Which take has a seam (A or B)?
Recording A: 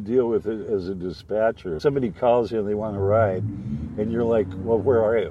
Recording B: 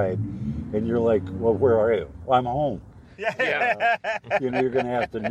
A